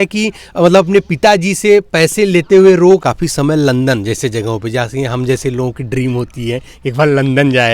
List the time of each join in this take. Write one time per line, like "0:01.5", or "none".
0:03.0